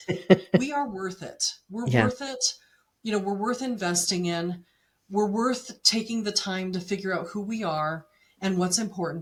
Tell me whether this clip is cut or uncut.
uncut